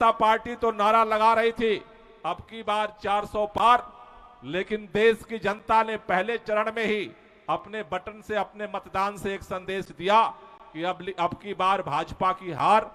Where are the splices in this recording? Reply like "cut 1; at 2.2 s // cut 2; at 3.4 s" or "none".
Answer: none